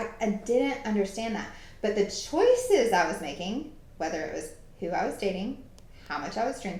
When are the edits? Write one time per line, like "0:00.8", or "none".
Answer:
none